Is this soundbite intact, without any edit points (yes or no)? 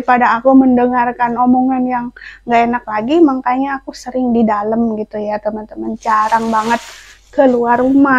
yes